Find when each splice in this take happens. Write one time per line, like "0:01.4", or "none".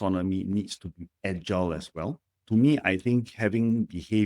0:02.3

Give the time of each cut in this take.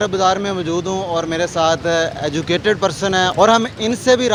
none

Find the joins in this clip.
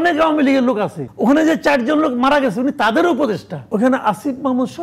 0:01.0
0:03.7

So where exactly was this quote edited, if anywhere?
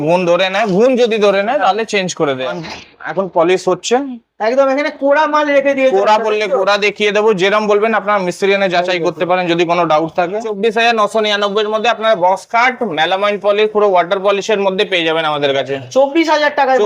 0:02.4
0:10.5

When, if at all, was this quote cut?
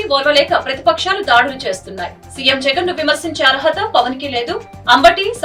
none

